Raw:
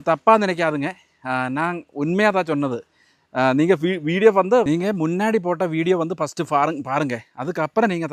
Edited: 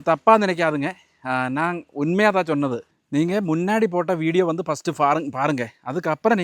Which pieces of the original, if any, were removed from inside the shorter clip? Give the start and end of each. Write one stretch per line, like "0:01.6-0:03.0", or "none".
0:03.1-0:04.7